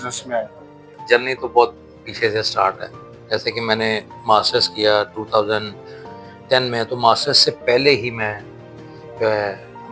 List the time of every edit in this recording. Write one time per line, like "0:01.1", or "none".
0:01.0